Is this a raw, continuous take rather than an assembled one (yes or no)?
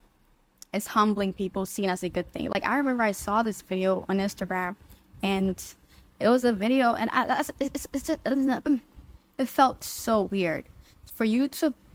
yes